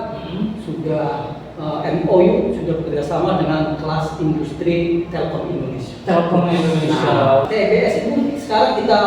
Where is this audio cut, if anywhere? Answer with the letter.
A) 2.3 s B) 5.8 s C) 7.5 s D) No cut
C